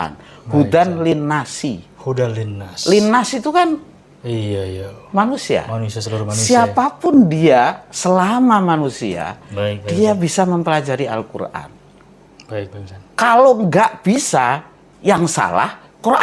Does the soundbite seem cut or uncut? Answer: uncut